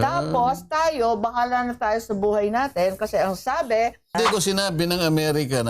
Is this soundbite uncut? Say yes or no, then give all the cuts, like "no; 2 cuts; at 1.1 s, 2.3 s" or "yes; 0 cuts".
no; 1 cut; at 4.1 s